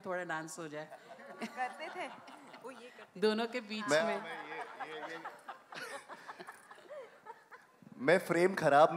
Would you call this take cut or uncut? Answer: uncut